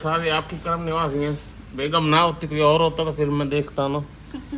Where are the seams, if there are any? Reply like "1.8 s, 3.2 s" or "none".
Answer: none